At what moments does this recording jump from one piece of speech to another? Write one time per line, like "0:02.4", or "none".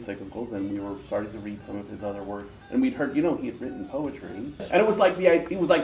0:02.5
0:04.7